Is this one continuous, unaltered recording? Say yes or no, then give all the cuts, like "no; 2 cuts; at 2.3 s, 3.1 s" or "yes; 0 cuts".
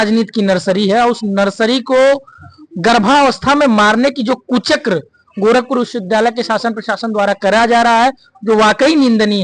yes; 0 cuts